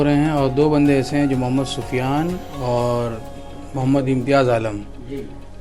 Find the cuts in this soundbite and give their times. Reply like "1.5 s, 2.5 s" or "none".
none

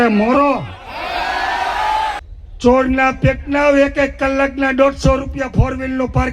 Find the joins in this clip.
2.2 s

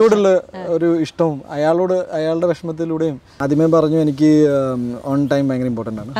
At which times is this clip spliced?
3.4 s

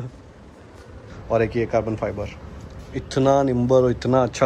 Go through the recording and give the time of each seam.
1.0 s

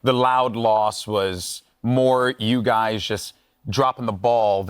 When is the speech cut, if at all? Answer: none

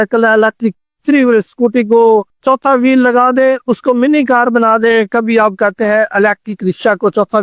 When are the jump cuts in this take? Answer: none

